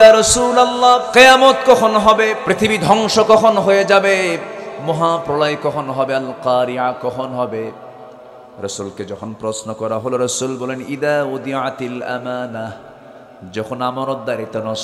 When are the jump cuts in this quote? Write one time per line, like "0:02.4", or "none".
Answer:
0:01.1
0:02.4